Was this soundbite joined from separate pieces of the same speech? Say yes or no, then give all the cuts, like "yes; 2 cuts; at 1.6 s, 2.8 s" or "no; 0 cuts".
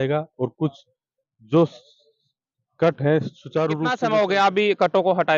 yes; 1 cut; at 3.9 s